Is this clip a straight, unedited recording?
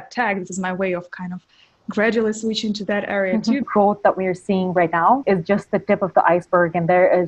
no; 2 cuts; at 3.7 s, 5.2 s

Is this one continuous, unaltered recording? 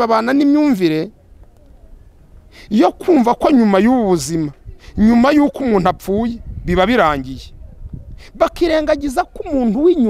yes; 0 cuts

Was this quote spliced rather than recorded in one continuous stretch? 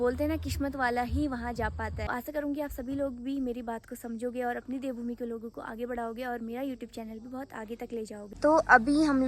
yes; 2 cuts; at 2.1 s, 8.3 s

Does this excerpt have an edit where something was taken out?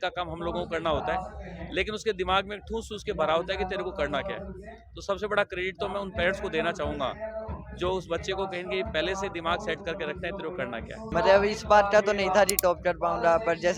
yes; 1 cut; at 11.0 s

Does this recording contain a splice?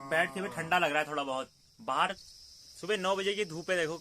yes; 1 cut; at 2.2 s

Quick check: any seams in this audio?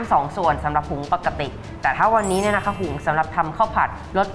no; 0 cuts

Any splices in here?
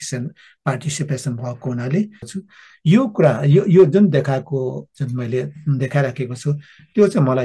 yes; 1 cut; at 2.2 s

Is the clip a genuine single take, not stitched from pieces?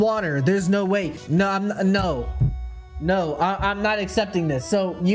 no; 1 cut; at 1.2 s

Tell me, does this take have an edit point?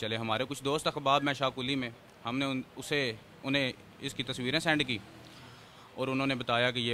no; 0 cuts

